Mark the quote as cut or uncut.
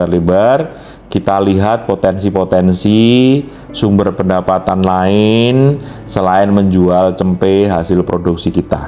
uncut